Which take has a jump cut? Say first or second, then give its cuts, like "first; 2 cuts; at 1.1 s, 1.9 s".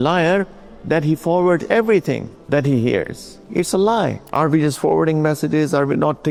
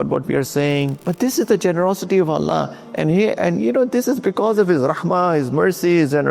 second; 1 cut; at 1.0 s